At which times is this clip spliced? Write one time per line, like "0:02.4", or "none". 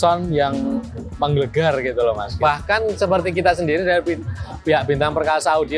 0:02.3